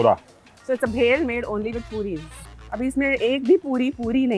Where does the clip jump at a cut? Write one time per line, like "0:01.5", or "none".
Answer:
none

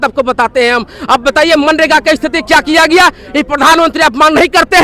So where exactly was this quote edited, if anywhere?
none

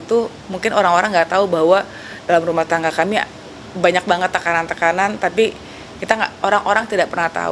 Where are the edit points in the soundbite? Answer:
none

